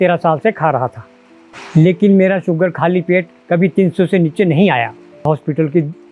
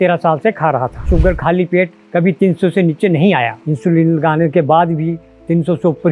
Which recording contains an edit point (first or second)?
second